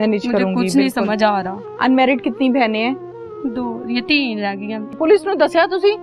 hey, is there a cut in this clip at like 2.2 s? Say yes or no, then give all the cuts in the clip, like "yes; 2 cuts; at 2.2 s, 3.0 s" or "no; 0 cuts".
no; 1 cut; at 5.0 s